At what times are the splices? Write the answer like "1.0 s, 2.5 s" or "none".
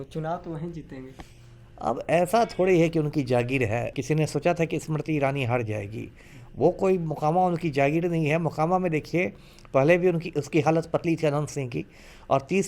3.9 s